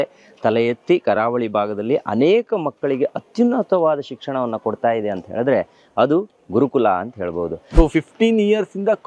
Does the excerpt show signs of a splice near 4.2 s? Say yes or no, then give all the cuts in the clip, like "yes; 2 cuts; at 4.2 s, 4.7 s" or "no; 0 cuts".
no; 1 cut; at 7.7 s